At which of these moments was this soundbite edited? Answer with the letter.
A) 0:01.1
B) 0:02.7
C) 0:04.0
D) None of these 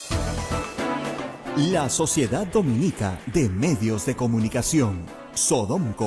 A